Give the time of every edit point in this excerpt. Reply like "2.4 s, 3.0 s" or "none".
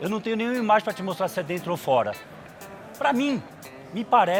none